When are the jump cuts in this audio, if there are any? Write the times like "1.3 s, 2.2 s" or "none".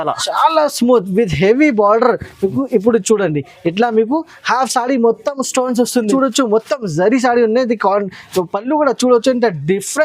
6.1 s